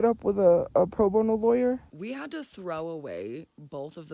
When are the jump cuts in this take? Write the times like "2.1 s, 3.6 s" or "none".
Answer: 1.9 s